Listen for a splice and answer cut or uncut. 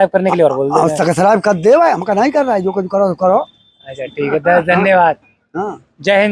uncut